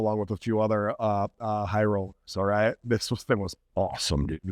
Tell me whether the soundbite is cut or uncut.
uncut